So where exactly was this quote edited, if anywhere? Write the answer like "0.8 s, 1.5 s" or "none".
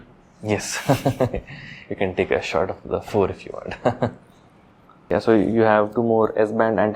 none